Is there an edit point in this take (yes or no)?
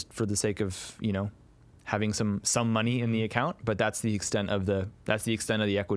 no